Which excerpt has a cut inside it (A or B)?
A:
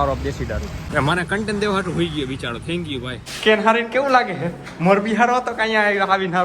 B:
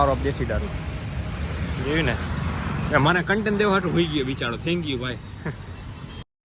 A